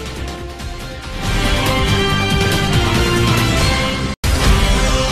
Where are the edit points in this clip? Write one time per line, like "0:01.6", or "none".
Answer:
none